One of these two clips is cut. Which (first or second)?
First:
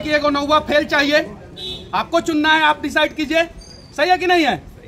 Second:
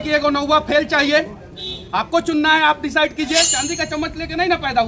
second